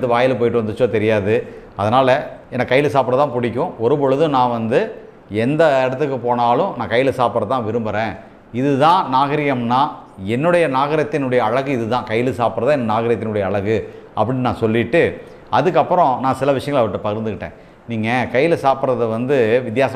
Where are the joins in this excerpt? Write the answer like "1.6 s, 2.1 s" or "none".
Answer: none